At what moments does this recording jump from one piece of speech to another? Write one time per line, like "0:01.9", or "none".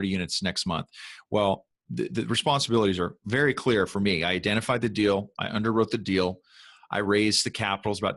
0:01.8